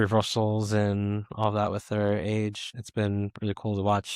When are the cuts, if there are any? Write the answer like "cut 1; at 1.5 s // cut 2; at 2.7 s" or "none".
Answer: cut 1; at 2.6 s